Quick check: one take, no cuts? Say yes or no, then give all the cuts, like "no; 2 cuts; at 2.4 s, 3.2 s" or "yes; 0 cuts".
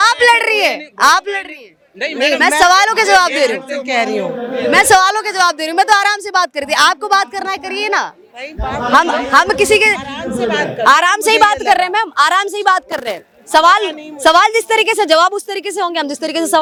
yes; 0 cuts